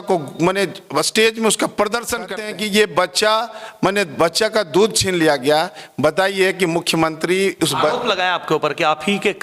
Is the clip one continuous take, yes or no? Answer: no